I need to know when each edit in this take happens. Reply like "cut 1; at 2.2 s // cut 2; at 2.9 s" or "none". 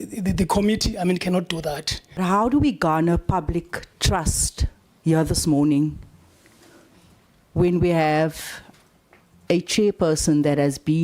cut 1; at 2.2 s